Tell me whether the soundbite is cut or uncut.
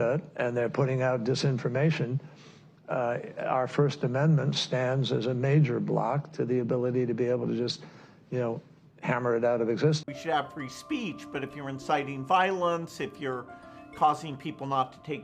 cut